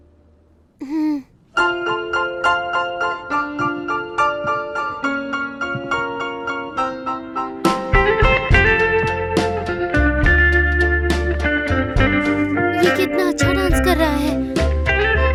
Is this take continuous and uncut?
yes; 0 cuts

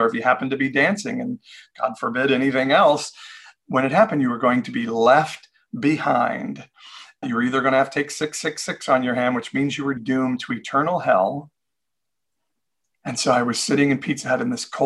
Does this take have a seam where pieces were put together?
yes; 2 cuts; at 7.2 s, 10.0 s

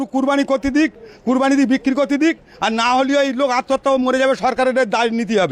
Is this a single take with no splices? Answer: yes; 0 cuts

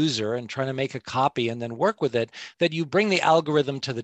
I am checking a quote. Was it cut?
yes; 1 cut; at 2.9 s

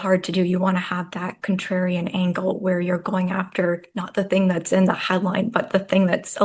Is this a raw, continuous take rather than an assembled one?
yes; 0 cuts

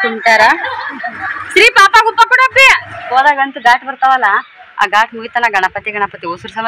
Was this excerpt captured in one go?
no; 1 cut; at 3.1 s

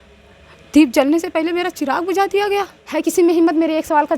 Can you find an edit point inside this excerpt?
yes; 1 cut; at 2.8 s

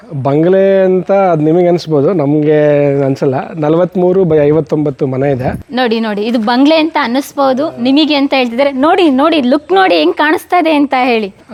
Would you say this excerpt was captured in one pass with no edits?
yes; 0 cuts

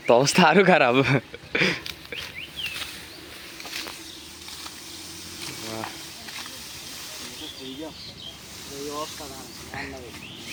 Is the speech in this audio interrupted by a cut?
no; 0 cuts

